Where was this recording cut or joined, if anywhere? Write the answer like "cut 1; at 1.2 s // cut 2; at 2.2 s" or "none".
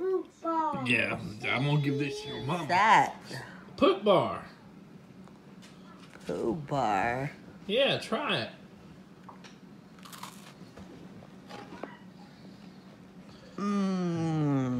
none